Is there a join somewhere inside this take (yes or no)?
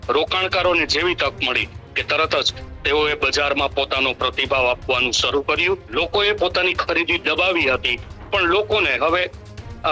yes